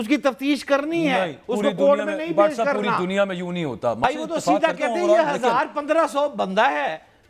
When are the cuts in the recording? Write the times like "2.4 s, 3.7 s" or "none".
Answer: 4.0 s